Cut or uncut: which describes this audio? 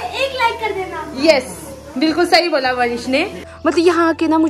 cut